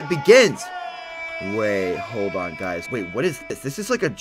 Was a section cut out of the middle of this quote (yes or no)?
yes